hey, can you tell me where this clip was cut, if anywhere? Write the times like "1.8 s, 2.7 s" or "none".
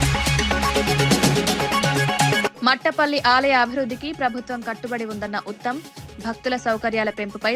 2.5 s